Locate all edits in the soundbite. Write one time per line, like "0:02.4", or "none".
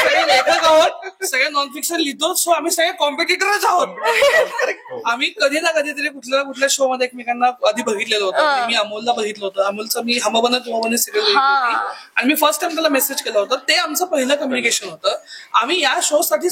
none

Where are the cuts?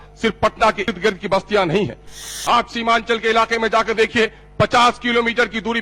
0:00.9
0:02.2

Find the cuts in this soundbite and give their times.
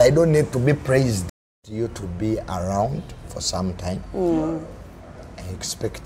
0:01.3

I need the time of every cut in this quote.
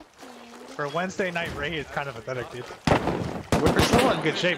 0:03.4

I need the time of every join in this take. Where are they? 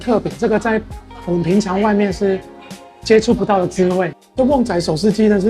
0:04.2

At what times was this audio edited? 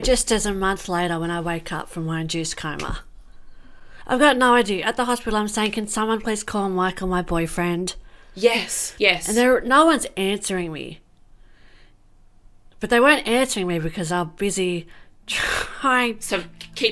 none

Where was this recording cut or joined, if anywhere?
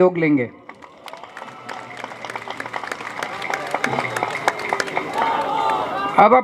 none

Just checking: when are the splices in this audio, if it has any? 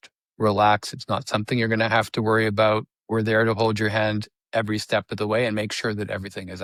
none

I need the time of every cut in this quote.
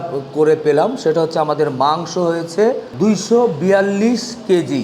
0:02.9

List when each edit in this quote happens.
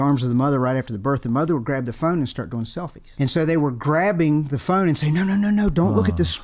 0:03.0

